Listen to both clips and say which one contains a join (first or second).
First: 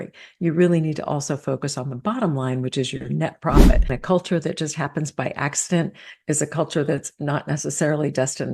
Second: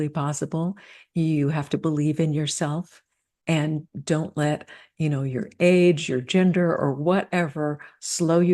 first